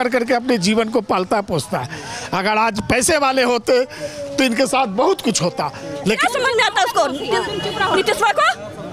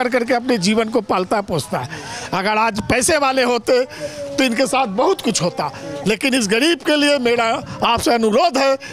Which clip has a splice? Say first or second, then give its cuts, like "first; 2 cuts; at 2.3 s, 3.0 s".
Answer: first; 1 cut; at 6.2 s